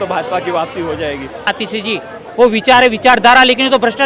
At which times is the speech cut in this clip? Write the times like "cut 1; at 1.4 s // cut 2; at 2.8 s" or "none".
cut 1; at 1.5 s